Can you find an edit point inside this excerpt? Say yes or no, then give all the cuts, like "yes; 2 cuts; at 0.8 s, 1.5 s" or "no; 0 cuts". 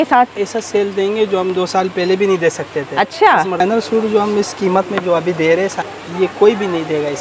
yes; 2 cuts; at 3.6 s, 5.8 s